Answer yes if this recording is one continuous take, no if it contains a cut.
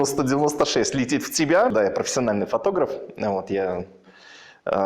no